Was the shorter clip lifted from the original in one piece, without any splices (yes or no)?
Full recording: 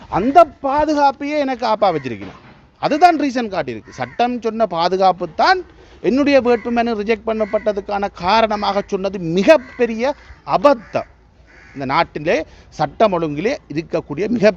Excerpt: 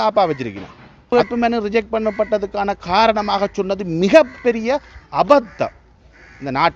no